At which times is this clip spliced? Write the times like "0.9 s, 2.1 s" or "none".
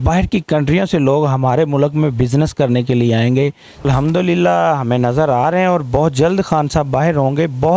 3.9 s